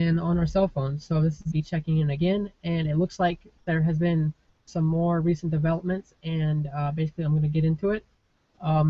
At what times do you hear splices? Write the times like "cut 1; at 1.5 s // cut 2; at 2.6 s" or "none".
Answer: none